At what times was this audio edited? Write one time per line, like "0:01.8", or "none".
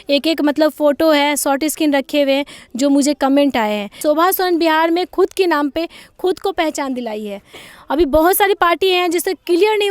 0:04.0
0:07.6